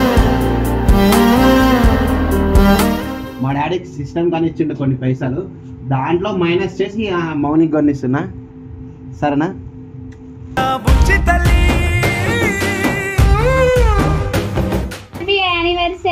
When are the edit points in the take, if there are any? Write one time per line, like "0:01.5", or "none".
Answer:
0:03.3
0:15.2